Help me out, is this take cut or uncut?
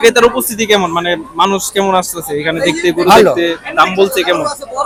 uncut